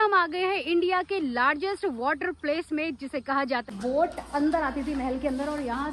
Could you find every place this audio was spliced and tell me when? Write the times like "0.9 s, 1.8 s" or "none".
3.7 s